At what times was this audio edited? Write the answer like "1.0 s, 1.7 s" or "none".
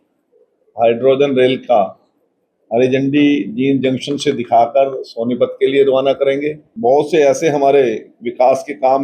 6.6 s